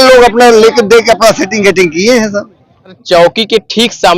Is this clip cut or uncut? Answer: cut